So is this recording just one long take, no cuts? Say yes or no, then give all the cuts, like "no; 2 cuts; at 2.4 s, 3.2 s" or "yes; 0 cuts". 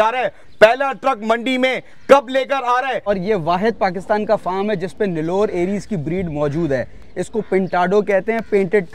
no; 1 cut; at 3.1 s